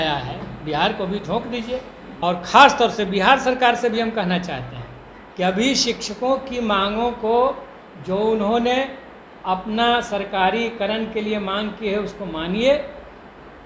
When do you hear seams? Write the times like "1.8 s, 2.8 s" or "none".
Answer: 2.0 s